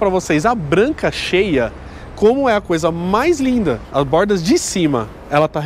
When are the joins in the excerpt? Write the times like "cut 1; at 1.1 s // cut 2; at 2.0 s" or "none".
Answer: cut 1; at 3.8 s